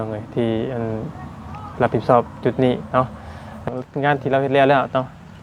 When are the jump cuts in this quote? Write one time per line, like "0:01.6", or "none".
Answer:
0:03.6